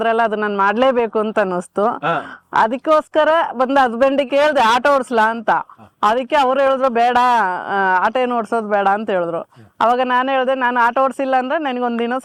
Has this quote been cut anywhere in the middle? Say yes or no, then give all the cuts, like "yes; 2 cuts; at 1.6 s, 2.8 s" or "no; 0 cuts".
no; 0 cuts